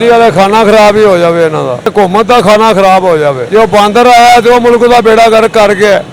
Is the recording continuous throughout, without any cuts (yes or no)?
no